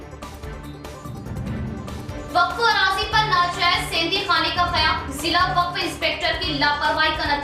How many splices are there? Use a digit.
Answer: 1